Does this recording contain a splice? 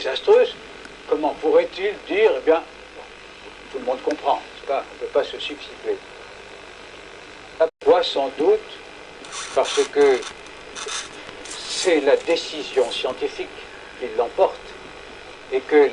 no; 0 cuts

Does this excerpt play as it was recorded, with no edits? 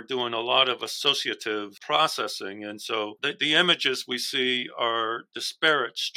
no; 2 cuts; at 1.8 s, 3.2 s

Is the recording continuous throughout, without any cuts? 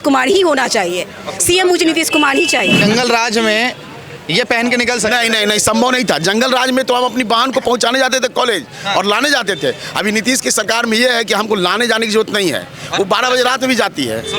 no; 1 cut; at 2.8 s

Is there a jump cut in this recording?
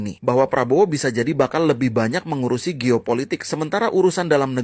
no; 0 cuts

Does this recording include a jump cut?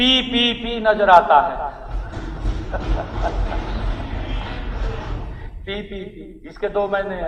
no; 0 cuts

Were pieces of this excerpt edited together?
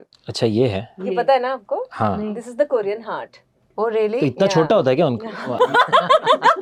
no; 0 cuts

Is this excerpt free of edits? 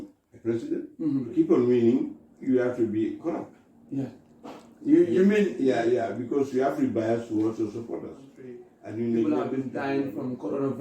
no; 2 cuts; at 1.3 s, 9.4 s

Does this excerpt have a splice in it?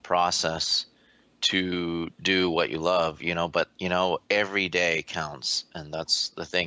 no; 0 cuts

